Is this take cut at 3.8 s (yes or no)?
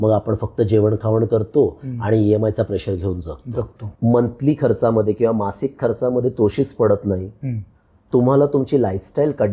yes